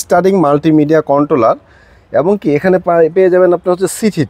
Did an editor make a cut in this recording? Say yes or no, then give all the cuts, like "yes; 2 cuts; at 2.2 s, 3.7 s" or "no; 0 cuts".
no; 0 cuts